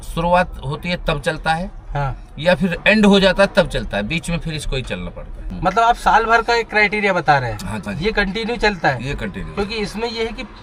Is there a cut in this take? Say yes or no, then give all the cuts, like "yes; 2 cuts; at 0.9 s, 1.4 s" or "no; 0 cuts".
no; 0 cuts